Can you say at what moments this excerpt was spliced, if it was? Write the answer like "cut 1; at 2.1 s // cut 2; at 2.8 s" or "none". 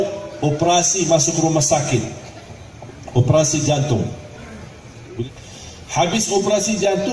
cut 1; at 5.2 s